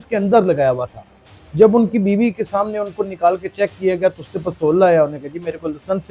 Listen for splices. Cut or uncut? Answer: uncut